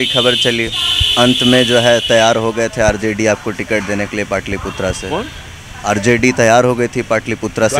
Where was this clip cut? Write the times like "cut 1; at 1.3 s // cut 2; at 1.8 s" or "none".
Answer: none